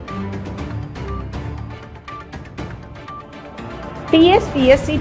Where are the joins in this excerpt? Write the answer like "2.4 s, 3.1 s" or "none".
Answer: 4.1 s